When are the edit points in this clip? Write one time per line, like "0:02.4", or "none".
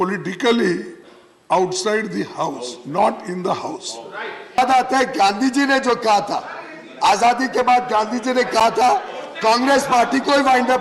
0:04.6